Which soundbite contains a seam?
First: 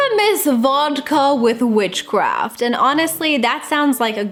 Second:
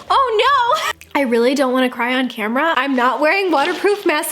second; 2 cuts; at 0.9 s, 2.8 s

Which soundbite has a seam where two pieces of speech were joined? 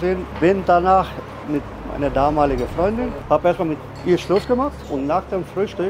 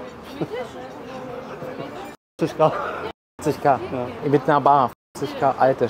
first; 2 cuts; at 1.4 s, 3.2 s

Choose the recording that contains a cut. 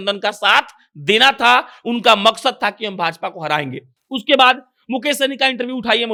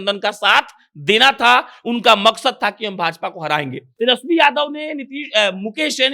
second; 1 cut; at 3.8 s

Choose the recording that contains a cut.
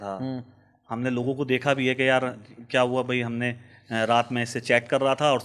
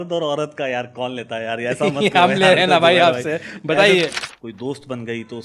second; 1 cut; at 4.2 s

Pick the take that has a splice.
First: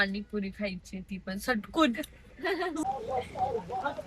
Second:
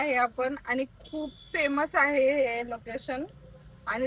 first; 1 cut; at 2.8 s

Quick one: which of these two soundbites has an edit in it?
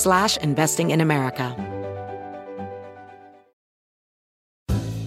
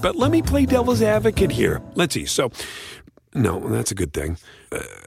first; 1 cut; at 1.5 s

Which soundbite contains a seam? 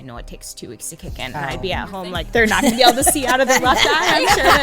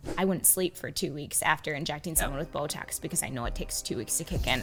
first; 1 cut; at 2.3 s

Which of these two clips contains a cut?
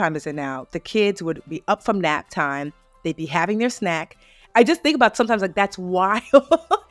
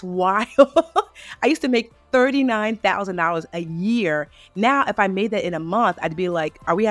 first; 1 cut; at 4.4 s

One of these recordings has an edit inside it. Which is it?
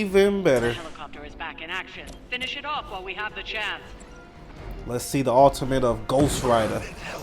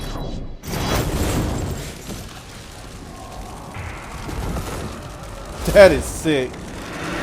first; 1 cut; at 4.5 s

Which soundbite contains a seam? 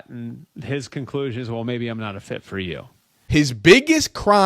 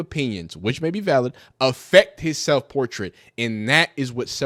first; 1 cut; at 3.1 s

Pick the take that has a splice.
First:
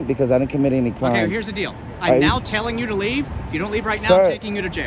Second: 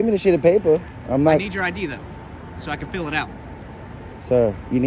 first; 1 cut; at 1.3 s

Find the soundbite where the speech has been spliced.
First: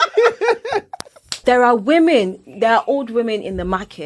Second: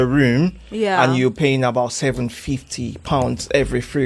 first; 1 cut; at 1.4 s

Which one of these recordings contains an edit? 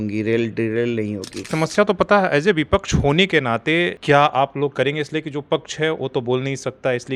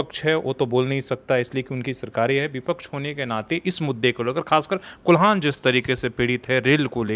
first; 2 cuts; at 1.5 s, 4.0 s

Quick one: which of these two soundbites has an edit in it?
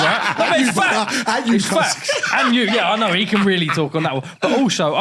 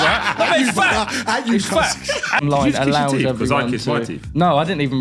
second; 1 cut; at 2.4 s

